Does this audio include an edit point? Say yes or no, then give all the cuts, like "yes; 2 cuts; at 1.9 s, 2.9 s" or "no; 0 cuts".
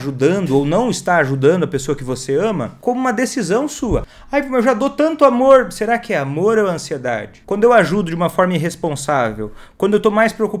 yes; 3 cuts; at 2.7 s, 4.1 s, 7.3 s